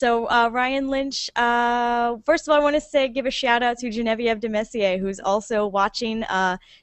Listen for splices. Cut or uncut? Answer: cut